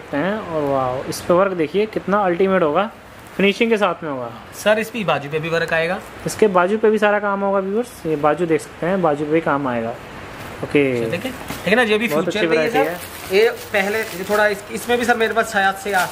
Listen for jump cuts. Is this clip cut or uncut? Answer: uncut